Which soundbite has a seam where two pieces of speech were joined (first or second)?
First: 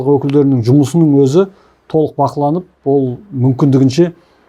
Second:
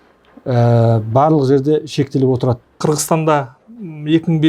second